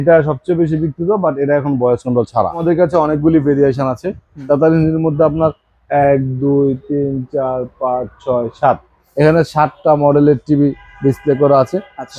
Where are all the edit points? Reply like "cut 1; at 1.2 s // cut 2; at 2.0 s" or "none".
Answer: cut 1; at 2.6 s

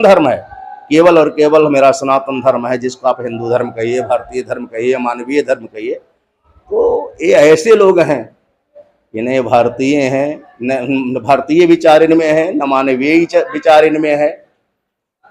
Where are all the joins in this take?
none

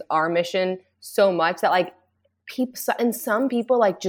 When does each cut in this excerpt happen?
none

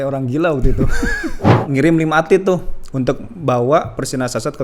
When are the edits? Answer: cut 1; at 1.6 s

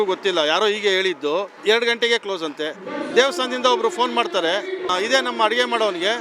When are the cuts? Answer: cut 1; at 1.5 s // cut 2; at 4.9 s

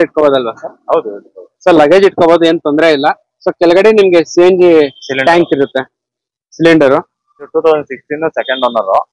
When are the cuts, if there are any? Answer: cut 1; at 7.5 s

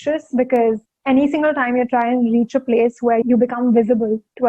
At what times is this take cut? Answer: cut 1; at 3.2 s

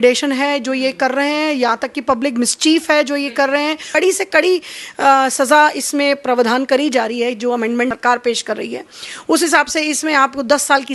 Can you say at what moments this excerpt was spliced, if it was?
cut 1; at 3.8 s

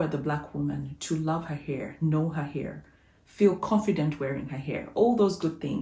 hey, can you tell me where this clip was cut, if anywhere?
none

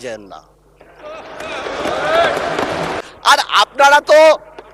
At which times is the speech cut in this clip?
cut 1; at 3.0 s

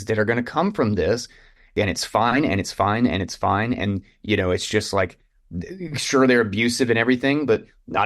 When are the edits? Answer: cut 1; at 1.6 s

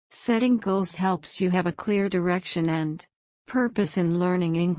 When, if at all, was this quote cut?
cut 1; at 3.7 s

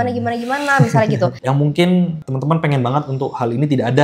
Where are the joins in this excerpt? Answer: cut 1; at 1.4 s

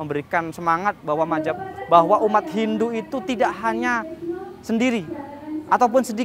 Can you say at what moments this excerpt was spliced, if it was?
none

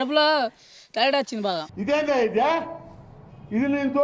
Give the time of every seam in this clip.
cut 1; at 1.6 s

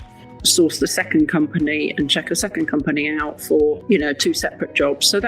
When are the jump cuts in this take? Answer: cut 1; at 3.8 s

